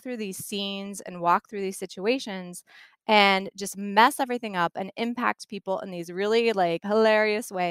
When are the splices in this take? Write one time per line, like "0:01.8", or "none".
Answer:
0:06.8